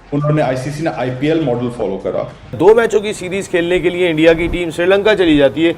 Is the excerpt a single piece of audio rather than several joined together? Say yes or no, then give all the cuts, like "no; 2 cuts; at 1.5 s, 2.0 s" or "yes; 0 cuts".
no; 1 cut; at 2.6 s